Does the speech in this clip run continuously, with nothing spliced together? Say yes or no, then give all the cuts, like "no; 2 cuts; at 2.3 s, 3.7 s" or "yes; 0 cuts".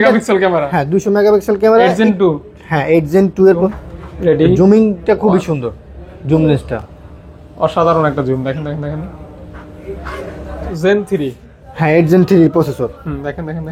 no; 2 cuts; at 3.7 s, 10.7 s